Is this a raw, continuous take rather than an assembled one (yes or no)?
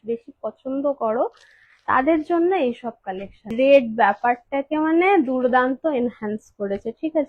no